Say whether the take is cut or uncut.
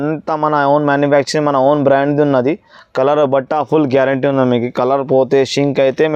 uncut